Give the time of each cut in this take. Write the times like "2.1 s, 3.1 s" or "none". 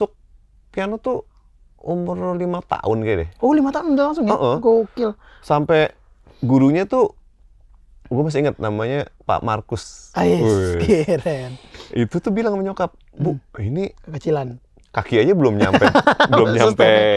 none